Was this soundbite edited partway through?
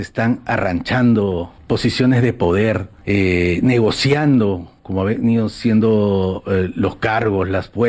yes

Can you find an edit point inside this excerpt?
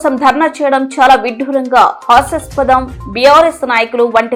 no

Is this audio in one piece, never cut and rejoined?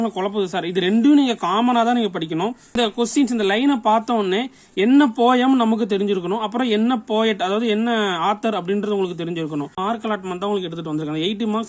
no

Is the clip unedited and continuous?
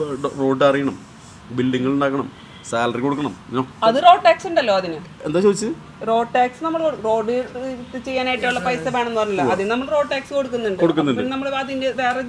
yes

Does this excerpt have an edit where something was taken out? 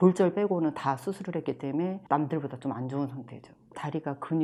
no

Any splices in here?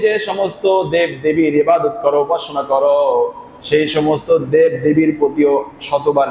no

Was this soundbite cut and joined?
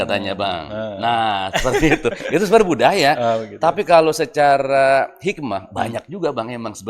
no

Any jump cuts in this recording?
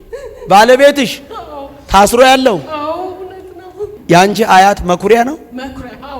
yes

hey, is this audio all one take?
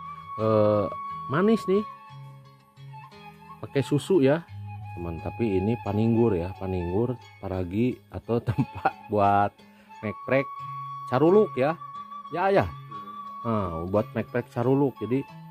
no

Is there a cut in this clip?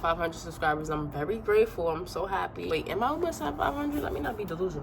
yes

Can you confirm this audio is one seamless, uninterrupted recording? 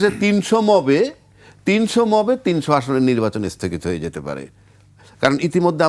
yes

